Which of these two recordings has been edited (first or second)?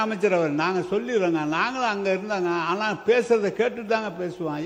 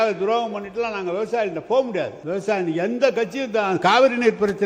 second